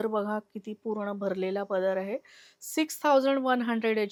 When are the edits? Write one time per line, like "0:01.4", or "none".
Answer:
none